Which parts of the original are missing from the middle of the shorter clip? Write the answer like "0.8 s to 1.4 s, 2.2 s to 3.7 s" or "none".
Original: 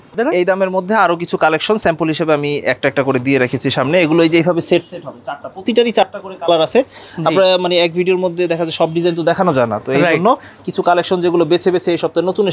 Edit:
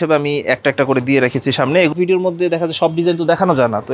4.1 s to 7.9 s